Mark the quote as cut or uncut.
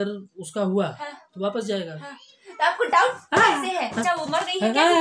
cut